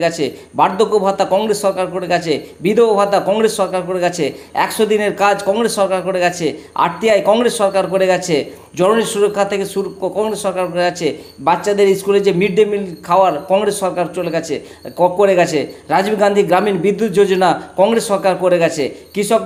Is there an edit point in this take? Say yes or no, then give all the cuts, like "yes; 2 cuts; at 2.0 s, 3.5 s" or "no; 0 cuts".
no; 0 cuts